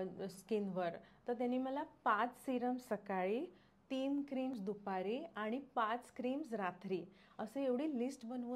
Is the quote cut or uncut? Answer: uncut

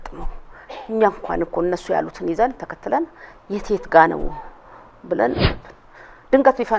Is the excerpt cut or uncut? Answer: cut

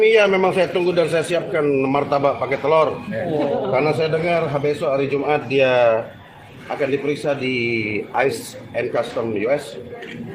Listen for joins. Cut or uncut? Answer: uncut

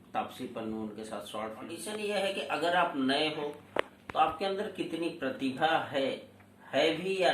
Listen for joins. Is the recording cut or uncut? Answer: cut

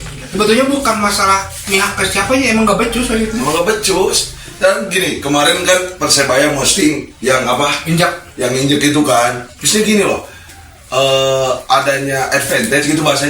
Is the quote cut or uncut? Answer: uncut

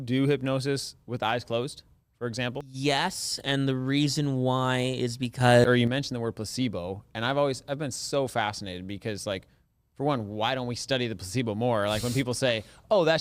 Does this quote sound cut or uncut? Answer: cut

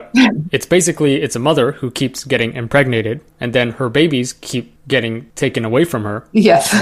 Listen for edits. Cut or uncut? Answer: uncut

